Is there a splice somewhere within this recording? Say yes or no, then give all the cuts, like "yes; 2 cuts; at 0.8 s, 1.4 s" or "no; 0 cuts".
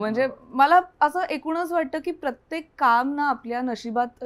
no; 0 cuts